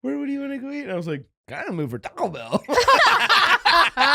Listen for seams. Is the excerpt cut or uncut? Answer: uncut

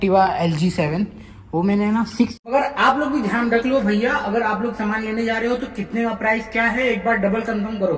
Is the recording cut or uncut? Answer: cut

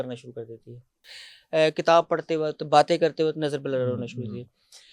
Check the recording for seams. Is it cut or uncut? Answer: cut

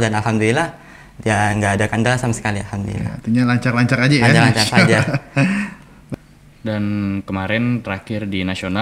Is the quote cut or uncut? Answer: cut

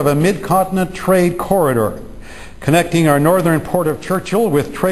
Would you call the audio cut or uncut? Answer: cut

